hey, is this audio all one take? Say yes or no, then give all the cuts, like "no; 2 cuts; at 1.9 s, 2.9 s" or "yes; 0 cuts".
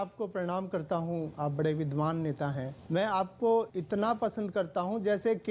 no; 3 cuts; at 1.3 s, 2.7 s, 3.8 s